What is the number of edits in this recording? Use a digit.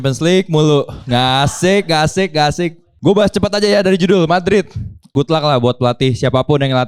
2